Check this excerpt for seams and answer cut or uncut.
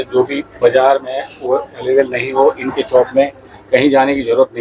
uncut